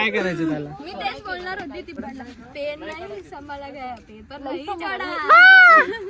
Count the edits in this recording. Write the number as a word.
one